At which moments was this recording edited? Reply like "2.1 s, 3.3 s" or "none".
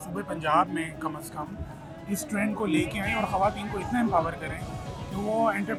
none

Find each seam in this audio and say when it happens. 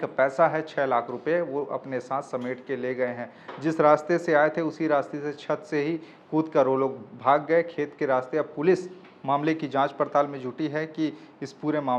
none

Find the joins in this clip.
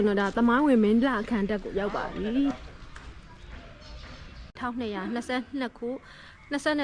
4.6 s

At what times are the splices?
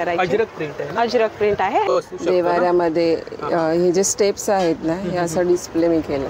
1.9 s

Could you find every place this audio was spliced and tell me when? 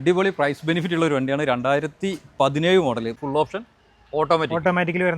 3.2 s

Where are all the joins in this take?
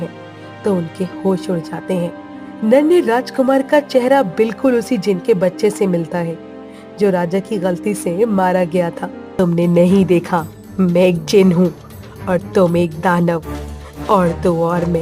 9.3 s

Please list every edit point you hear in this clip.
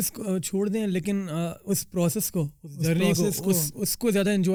none

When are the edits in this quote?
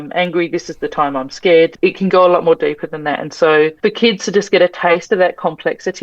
1.7 s, 3.7 s

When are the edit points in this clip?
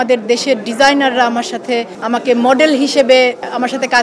1.9 s

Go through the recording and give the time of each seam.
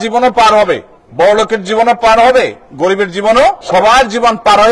3.6 s

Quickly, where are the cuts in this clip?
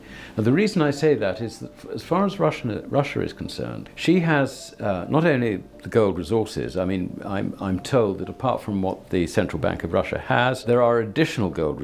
3.8 s, 10.6 s

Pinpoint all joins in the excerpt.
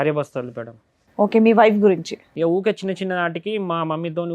2.2 s

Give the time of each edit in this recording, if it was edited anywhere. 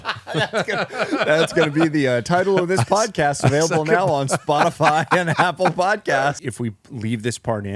6.5 s

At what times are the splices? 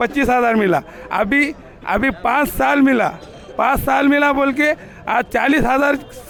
none

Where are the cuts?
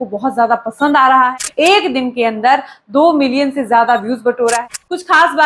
1.3 s, 4.6 s

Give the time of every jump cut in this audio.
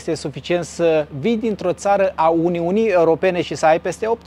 none

